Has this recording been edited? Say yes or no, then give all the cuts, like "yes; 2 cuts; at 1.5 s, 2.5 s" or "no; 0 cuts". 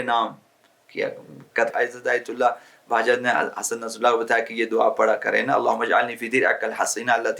yes; 1 cut; at 1.7 s